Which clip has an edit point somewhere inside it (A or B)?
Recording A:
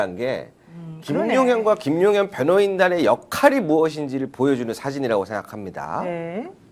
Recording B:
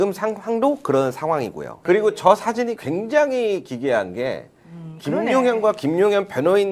B